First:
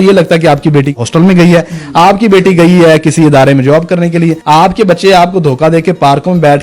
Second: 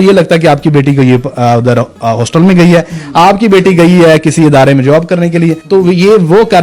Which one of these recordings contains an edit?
first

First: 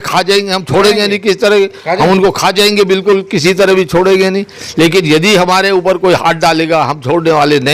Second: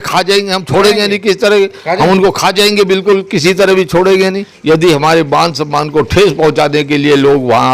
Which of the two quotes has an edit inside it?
second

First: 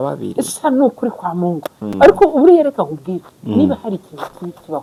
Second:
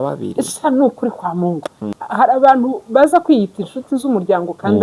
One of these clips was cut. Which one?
second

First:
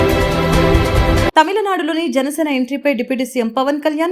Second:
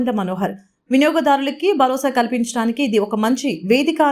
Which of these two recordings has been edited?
first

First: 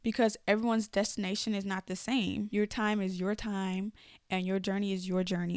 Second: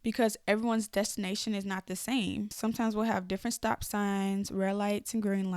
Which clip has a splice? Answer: first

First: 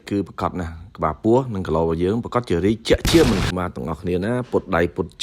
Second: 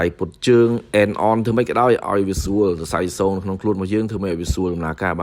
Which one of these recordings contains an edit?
first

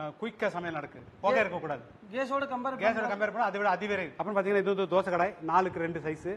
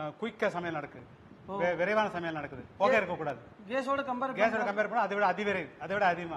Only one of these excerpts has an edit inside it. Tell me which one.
first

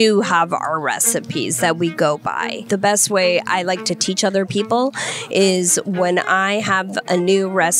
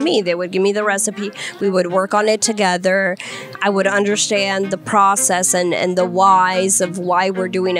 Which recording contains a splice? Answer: first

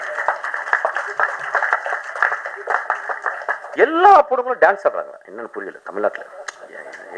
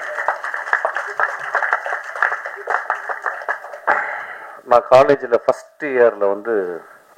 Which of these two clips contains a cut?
first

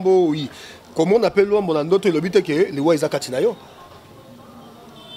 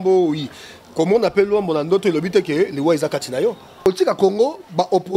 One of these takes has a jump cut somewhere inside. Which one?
second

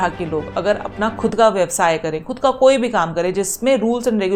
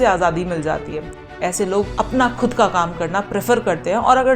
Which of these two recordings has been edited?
second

